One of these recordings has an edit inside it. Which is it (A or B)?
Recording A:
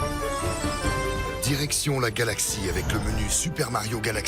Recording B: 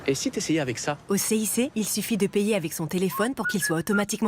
B